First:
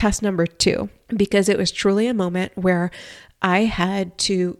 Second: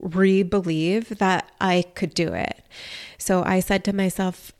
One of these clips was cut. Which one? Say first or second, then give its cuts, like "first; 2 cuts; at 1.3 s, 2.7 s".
first; 1 cut; at 1.0 s